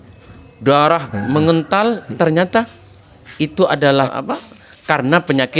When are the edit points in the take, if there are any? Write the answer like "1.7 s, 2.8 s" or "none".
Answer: 2.1 s, 4.1 s

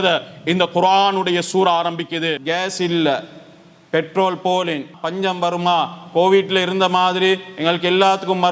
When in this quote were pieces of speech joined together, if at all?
2.4 s, 4.9 s

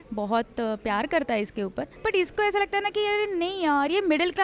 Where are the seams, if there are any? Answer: 1.9 s

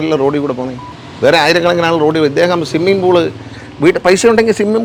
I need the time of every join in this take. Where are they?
none

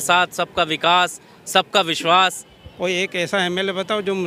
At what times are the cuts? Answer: none

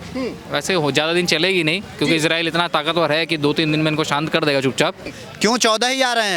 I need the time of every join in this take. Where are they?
5.1 s

